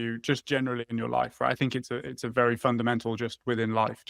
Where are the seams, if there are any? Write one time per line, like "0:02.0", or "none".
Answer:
none